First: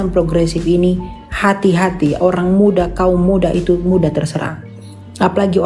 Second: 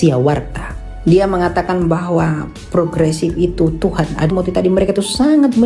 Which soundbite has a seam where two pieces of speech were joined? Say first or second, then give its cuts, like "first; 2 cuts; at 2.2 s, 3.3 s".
second; 1 cut; at 4.3 s